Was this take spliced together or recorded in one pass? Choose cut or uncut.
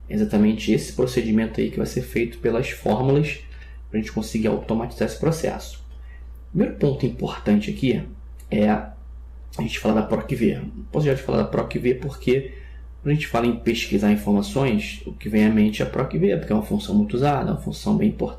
cut